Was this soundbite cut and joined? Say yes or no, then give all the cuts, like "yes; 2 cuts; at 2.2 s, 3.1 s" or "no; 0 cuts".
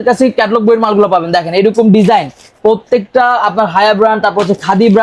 no; 0 cuts